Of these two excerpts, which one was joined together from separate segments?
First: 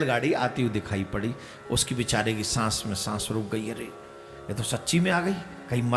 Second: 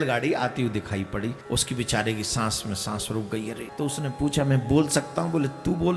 second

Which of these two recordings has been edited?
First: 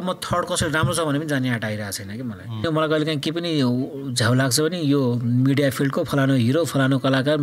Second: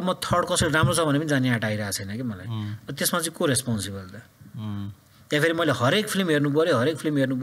first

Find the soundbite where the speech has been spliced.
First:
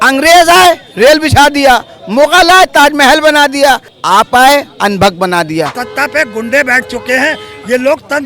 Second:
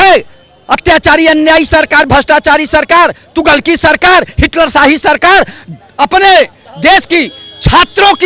first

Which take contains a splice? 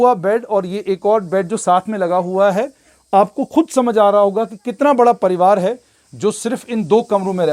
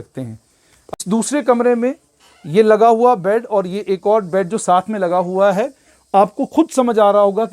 second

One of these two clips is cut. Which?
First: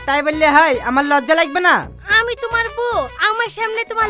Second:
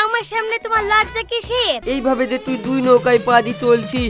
second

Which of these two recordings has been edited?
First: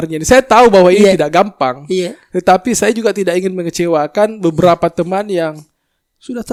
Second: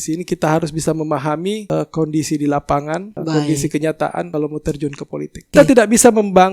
second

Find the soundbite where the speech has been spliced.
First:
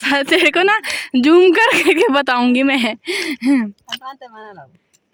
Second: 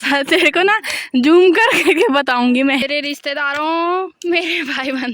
second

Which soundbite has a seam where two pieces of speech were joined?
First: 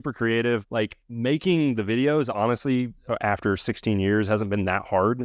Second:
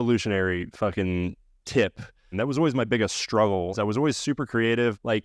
second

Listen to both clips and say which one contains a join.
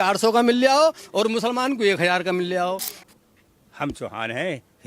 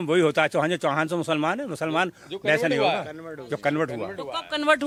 first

